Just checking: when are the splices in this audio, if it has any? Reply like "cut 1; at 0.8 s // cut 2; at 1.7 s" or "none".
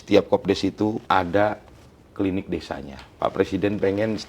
cut 1; at 1.0 s // cut 2; at 3.0 s

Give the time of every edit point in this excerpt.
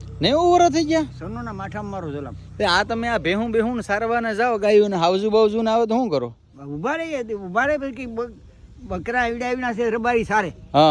none

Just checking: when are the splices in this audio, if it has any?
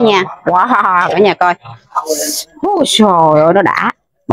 none

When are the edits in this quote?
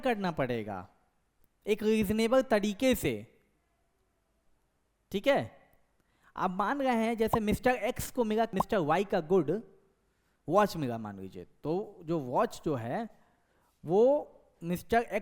cut 1; at 8.6 s

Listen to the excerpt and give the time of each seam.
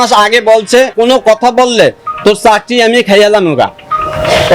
cut 1; at 0.9 s

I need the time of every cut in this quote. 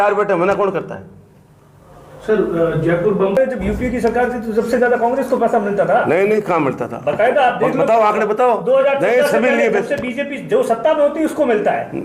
cut 1; at 3.4 s

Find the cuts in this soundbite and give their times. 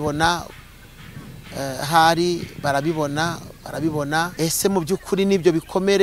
cut 1; at 4.3 s

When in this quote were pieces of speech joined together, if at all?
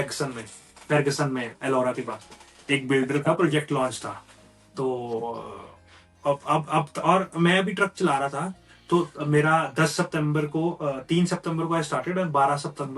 none

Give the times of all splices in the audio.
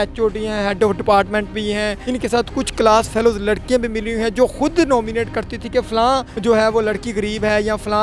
cut 1; at 2.0 s // cut 2; at 6.3 s

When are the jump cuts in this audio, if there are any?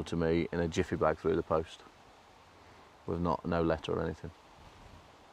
none

